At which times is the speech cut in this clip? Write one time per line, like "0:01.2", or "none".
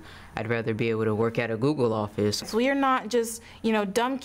0:02.4